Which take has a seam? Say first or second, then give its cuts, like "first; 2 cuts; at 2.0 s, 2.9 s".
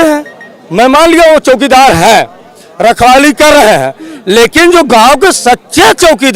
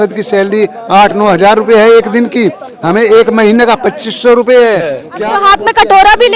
second; 1 cut; at 5.1 s